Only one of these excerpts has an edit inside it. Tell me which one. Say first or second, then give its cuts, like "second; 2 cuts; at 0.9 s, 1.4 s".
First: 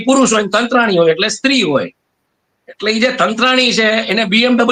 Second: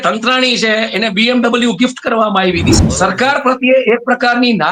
second; 1 cut; at 2.7 s